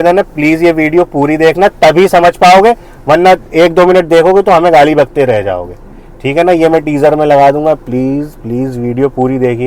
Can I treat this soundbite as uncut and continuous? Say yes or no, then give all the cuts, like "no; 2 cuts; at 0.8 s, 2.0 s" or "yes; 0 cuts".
yes; 0 cuts